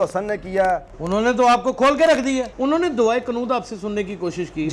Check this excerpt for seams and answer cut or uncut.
cut